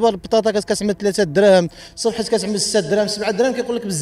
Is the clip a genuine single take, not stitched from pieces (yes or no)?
yes